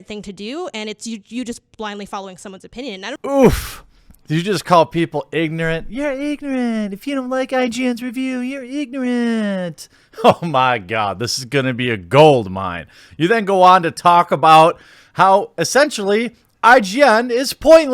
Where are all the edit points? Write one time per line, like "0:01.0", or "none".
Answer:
0:00.9
0:03.2